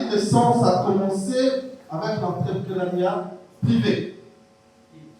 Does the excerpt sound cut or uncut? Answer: uncut